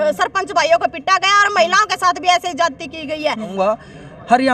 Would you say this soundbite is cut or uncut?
cut